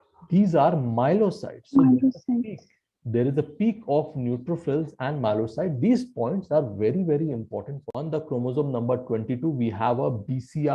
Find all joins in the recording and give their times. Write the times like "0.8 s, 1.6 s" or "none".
7.8 s